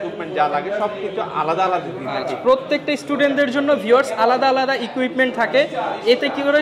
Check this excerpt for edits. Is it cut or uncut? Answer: uncut